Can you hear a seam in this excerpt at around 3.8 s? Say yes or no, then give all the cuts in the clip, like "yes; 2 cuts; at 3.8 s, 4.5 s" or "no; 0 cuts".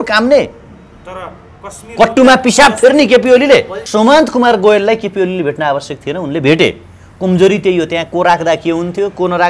yes; 1 cut; at 3.8 s